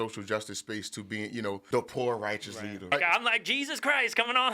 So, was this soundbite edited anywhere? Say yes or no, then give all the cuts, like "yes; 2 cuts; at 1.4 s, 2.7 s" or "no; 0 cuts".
yes; 2 cuts; at 1.6 s, 2.9 s